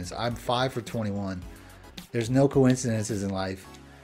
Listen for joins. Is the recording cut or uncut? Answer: uncut